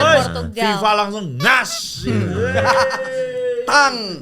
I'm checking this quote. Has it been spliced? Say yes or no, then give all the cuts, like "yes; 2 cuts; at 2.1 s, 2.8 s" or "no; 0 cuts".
no; 0 cuts